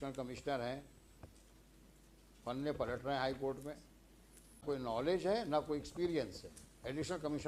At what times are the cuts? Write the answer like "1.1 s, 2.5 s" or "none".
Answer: 4.6 s